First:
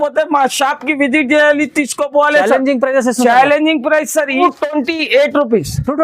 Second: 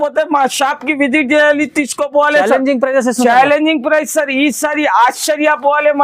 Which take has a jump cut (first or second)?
first